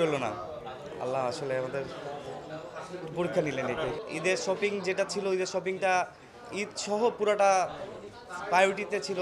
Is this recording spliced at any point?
yes; 1 cut; at 4.0 s

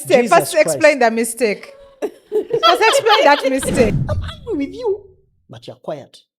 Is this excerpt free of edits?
no; 1 cut; at 4.0 s

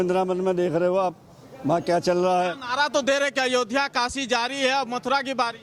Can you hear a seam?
no; 0 cuts

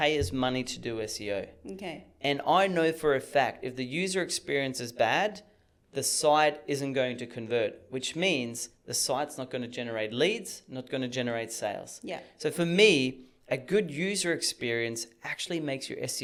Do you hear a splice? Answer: no; 0 cuts

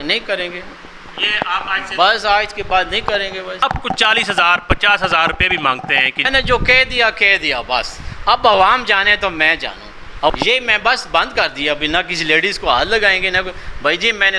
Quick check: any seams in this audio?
yes; 3 cuts; at 3.6 s, 6.3 s, 10.3 s

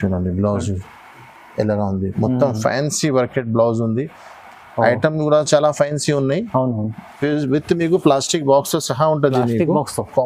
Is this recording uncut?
yes; 0 cuts

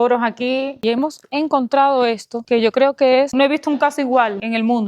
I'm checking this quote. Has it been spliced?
yes; 2 cuts; at 0.8 s, 3.3 s

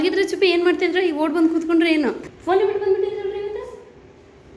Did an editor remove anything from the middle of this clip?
yes; 1 cut; at 2.2 s

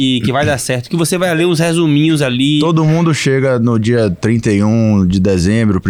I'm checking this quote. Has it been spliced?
no; 0 cuts

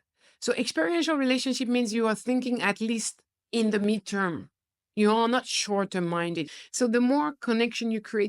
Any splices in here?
yes; 1 cut; at 6.4 s

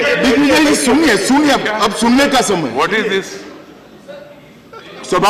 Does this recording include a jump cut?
no; 0 cuts

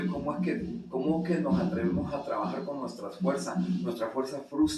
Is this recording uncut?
yes; 0 cuts

